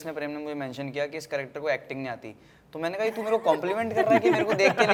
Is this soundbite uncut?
yes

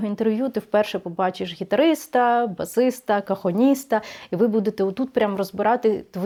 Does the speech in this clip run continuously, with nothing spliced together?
yes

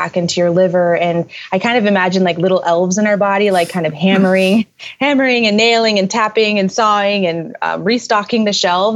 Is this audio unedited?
yes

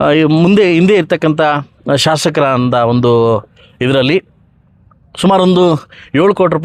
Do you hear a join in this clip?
no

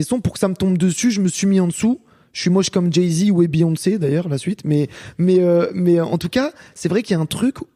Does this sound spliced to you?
no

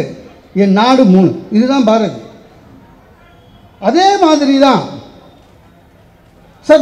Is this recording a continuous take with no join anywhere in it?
yes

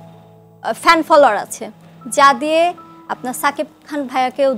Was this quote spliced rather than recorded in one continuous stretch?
no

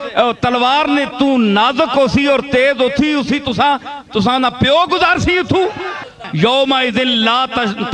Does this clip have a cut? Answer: yes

